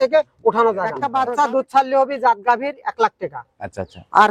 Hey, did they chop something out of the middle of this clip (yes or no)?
yes